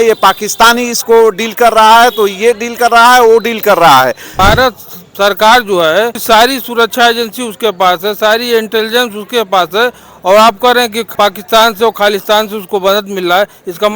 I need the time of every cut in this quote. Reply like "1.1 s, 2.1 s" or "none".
4.3 s, 6.2 s, 11.0 s